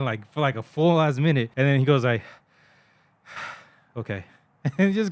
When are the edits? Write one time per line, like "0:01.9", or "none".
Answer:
0:01.5